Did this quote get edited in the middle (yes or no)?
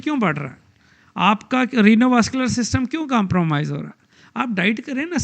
no